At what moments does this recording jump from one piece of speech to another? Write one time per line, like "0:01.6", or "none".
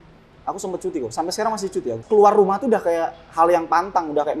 0:02.0